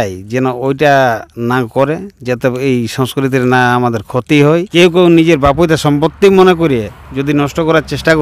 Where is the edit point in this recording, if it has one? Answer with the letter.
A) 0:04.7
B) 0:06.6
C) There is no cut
A